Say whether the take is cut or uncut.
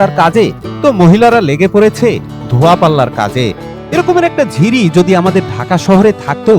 cut